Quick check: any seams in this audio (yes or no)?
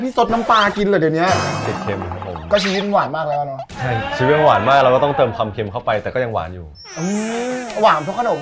yes